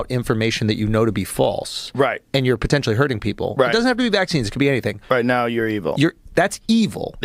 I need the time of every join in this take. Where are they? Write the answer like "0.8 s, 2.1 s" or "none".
none